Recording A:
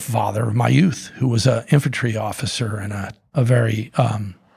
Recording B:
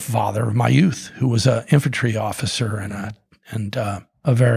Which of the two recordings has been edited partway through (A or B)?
A